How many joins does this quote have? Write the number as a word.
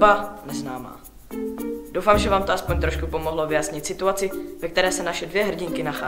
zero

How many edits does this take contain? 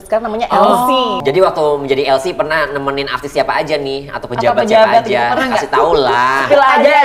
one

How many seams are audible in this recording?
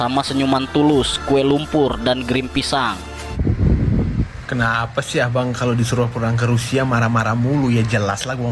one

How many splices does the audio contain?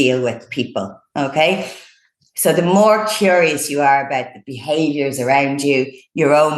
zero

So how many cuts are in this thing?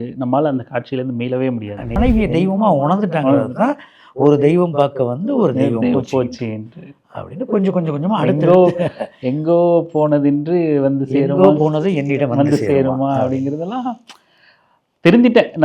one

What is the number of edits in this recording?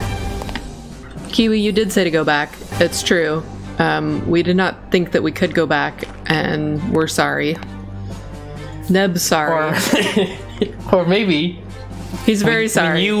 one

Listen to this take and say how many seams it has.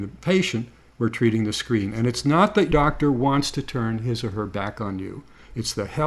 one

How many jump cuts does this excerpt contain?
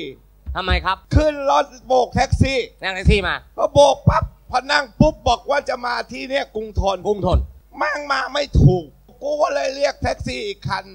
three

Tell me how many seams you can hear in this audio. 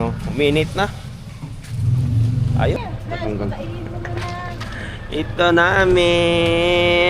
one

